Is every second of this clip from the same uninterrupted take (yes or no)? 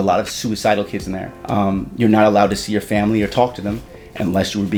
yes